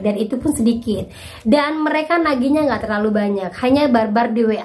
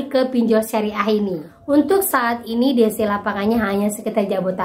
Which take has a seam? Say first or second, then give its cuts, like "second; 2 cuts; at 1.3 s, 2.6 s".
second; 1 cut; at 1.5 s